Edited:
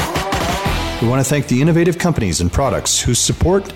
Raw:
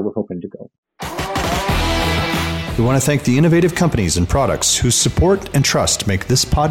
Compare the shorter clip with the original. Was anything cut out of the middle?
yes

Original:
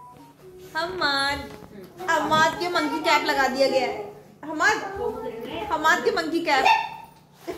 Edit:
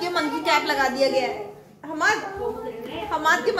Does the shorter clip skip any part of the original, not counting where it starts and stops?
no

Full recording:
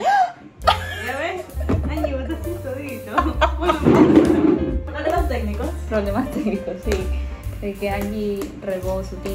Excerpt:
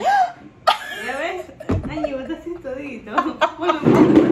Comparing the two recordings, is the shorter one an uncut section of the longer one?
yes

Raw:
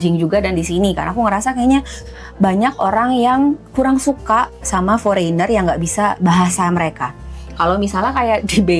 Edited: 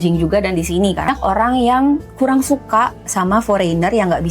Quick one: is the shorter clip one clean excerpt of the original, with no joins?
no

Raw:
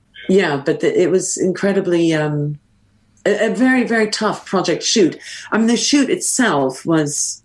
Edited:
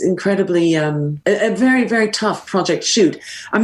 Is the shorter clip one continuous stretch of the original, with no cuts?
no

